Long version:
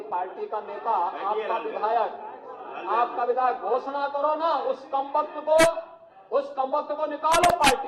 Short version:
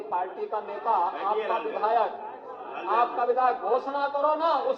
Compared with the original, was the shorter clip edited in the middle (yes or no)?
no